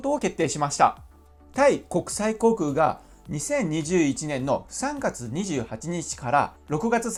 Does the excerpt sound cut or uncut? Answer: uncut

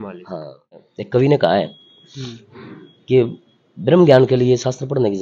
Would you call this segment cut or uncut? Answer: cut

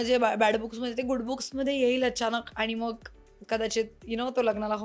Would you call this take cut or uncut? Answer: uncut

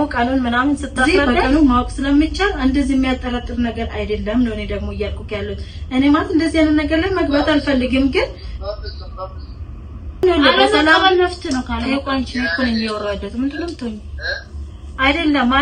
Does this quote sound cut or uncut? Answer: cut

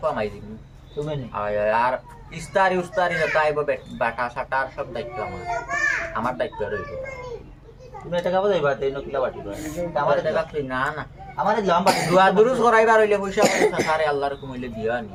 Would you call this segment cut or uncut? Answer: uncut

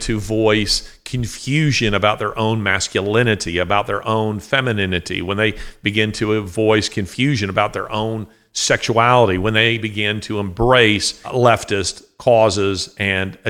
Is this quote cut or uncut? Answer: cut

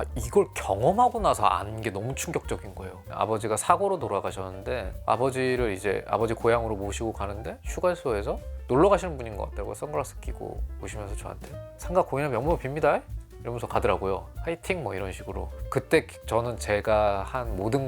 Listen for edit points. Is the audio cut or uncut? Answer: cut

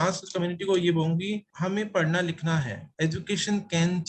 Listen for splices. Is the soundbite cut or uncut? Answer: cut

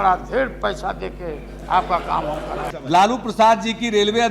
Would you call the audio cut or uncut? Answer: cut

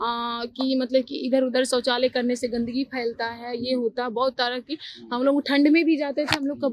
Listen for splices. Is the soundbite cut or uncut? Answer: uncut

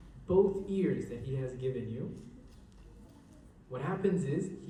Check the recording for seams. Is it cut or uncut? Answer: uncut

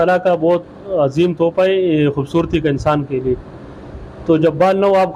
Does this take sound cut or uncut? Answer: uncut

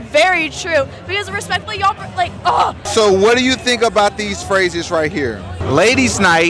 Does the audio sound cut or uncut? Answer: cut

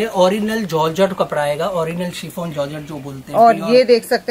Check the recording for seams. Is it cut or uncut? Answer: uncut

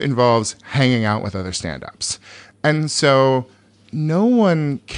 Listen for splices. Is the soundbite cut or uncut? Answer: uncut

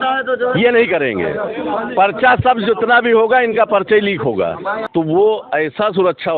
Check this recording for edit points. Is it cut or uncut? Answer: cut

